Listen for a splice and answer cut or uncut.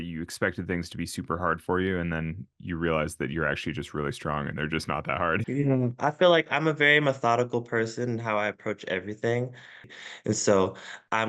cut